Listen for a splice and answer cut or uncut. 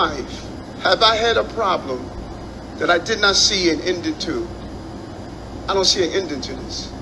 uncut